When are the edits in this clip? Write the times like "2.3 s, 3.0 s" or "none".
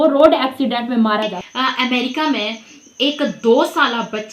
1.4 s